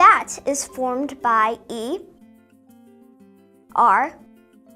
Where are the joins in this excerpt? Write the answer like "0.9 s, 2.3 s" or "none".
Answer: none